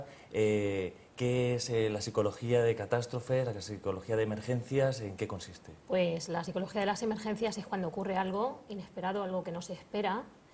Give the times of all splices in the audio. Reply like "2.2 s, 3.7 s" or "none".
1.4 s